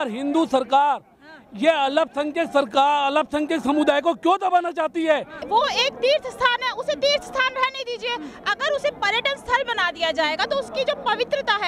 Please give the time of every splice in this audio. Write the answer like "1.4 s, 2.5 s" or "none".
5.3 s